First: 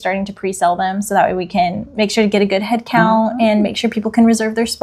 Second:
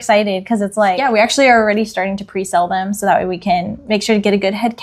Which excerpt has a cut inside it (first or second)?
second